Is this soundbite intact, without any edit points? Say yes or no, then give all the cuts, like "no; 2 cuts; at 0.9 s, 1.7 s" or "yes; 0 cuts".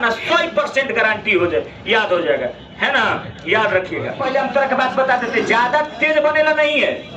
no; 1 cut; at 4.2 s